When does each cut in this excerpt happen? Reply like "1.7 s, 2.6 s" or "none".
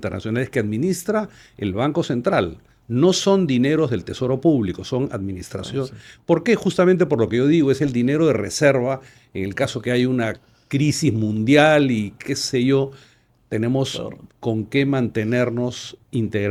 none